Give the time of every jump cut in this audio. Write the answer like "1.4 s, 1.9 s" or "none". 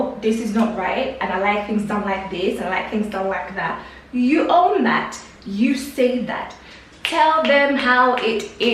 none